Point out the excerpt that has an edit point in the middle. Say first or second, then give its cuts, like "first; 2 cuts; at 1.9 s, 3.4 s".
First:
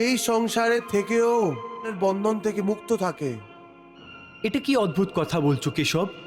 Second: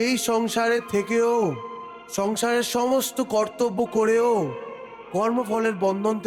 first; 1 cut; at 1.9 s